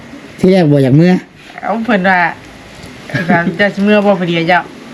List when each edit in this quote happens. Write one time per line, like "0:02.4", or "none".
none

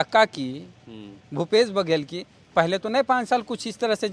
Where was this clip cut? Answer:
none

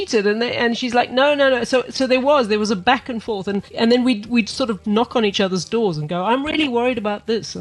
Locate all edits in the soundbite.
none

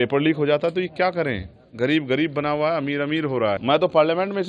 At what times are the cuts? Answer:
0:03.6

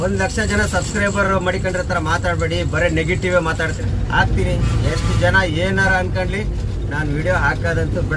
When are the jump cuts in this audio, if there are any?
0:03.8

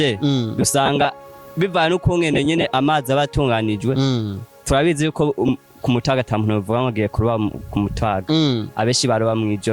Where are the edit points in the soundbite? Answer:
none

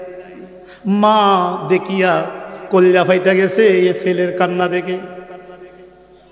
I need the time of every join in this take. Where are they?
none

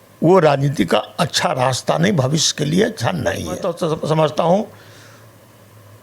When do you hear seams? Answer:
0:03.7

